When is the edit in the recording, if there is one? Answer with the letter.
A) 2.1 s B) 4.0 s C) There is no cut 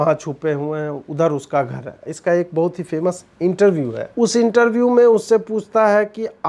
B